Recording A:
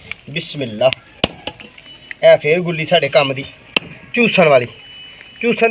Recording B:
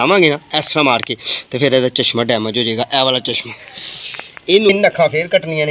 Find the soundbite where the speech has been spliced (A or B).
B